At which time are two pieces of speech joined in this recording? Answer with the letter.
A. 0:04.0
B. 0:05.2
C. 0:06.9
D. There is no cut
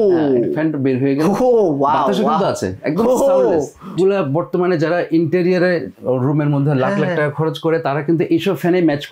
A